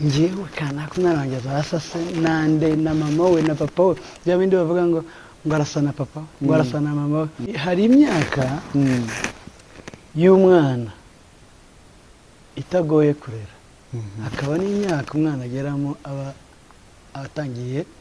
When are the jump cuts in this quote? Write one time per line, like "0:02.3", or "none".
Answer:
0:07.6